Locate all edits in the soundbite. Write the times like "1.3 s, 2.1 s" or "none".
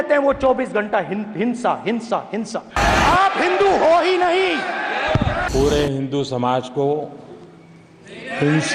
2.8 s, 5.4 s